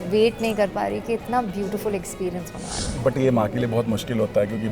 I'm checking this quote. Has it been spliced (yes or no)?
yes